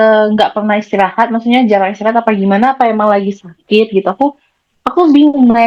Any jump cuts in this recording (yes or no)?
no